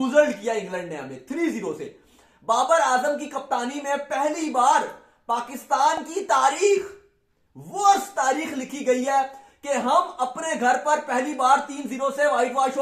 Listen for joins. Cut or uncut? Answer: uncut